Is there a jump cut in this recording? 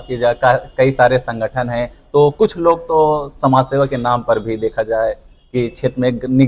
no; 0 cuts

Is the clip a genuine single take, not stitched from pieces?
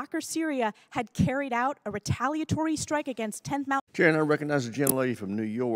no; 1 cut; at 3.9 s

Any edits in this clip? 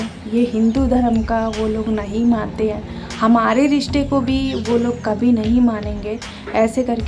no; 0 cuts

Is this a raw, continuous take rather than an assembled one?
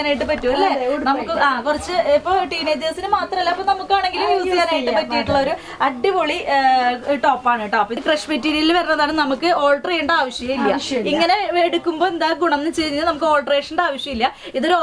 no; 1 cut; at 7.9 s

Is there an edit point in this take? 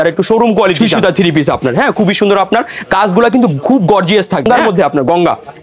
yes; 2 cuts; at 0.8 s, 4.5 s

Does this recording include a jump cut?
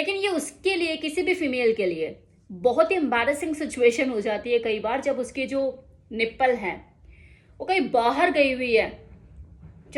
no; 0 cuts

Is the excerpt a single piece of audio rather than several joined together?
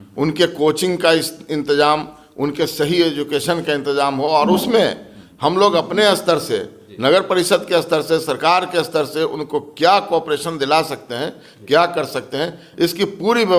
yes; 0 cuts

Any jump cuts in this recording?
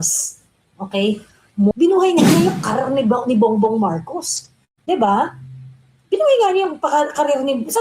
yes; 1 cut; at 1.7 s

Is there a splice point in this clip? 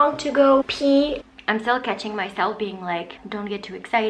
yes; 2 cuts; at 1.1 s, 3.2 s

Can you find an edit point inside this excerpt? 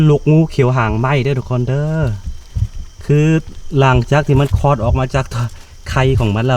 no; 0 cuts

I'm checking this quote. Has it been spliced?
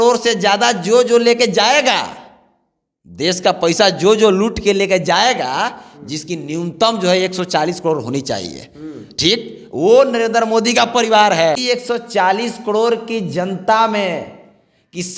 yes; 1 cut; at 11.6 s

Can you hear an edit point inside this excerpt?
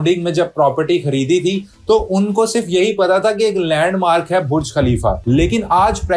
yes; 1 cut; at 5.2 s

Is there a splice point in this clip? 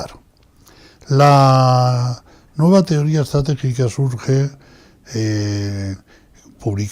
yes; 1 cut; at 5.5 s

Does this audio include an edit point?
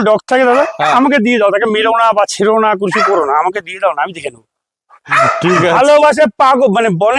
no; 0 cuts

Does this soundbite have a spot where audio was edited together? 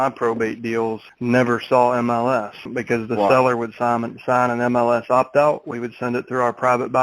yes; 2 cuts; at 1.1 s, 2.7 s

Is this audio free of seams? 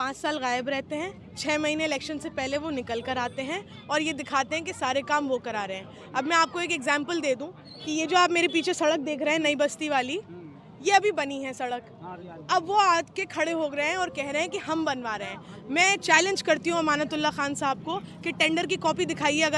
yes; 0 cuts

